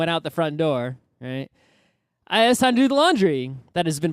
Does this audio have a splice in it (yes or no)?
yes